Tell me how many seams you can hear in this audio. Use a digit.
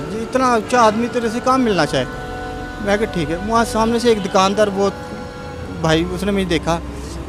0